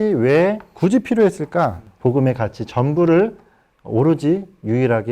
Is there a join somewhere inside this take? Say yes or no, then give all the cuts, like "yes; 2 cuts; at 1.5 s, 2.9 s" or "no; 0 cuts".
yes; 1 cut; at 1.8 s